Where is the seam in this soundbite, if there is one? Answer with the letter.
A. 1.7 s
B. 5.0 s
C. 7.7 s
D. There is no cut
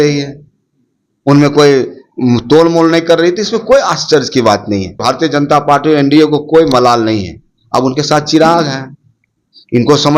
B